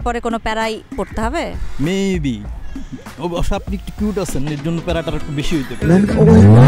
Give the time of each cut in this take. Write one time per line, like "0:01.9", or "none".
none